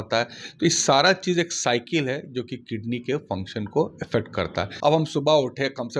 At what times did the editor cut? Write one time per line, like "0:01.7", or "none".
0:04.6